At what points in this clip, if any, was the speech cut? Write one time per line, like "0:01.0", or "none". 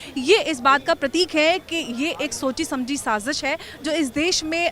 none

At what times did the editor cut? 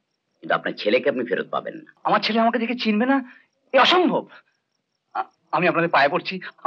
0:01.8

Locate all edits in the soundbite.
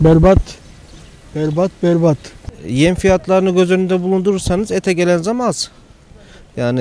none

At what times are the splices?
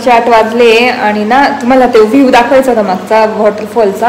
none

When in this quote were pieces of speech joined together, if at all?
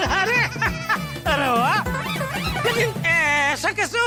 none

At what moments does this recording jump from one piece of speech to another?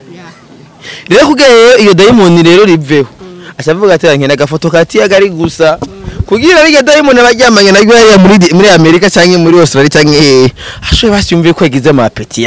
none

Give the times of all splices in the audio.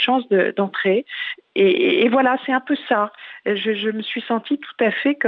0:01.3

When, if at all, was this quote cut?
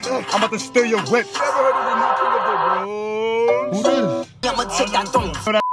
0:01.3
0:04.4

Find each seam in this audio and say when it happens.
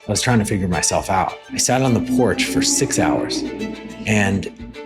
0:01.5

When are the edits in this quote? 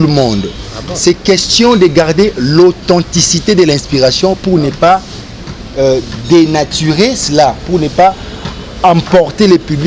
none

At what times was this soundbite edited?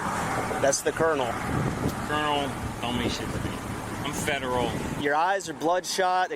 0:04.0
0:05.0

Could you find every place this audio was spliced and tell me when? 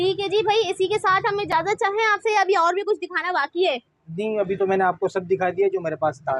none

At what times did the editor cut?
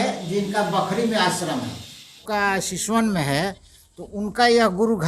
0:02.2

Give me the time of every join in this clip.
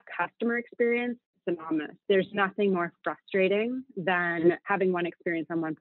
0:02.0
0:04.6

